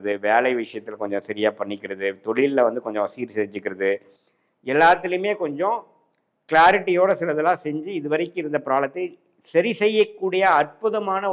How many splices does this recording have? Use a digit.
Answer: 0